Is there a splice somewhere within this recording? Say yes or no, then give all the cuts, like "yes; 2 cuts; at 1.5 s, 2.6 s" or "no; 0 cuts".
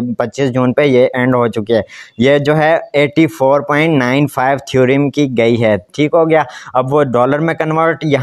no; 0 cuts